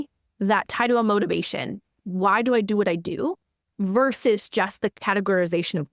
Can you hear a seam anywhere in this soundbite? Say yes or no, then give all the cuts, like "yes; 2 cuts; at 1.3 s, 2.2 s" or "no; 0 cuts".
yes; 2 cuts; at 2.0 s, 4.9 s